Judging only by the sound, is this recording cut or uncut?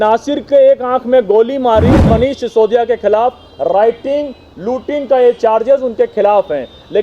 cut